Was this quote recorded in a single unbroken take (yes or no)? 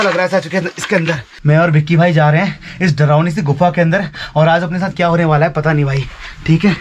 no